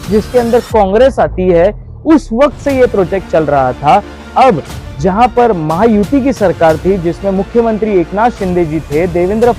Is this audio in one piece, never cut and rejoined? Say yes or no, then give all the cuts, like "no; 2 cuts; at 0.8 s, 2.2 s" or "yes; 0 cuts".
yes; 0 cuts